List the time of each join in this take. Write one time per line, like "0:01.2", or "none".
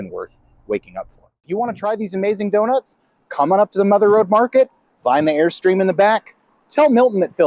0:01.4